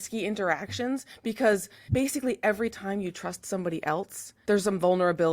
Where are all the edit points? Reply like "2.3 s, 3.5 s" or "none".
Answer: 1.8 s, 4.2 s